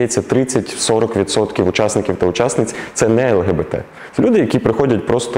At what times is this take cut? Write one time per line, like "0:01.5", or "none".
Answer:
none